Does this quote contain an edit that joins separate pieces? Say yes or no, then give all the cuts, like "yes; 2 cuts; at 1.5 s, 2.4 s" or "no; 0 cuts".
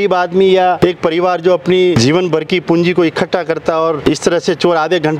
yes; 3 cuts; at 0.8 s, 2.0 s, 4.0 s